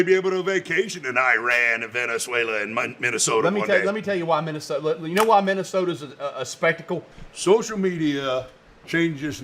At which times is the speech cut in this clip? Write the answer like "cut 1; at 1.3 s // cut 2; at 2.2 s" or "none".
cut 1; at 7.1 s